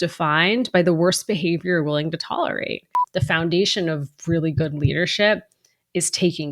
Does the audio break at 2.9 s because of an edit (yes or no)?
yes